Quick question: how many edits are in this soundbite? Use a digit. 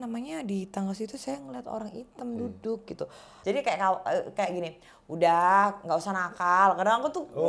1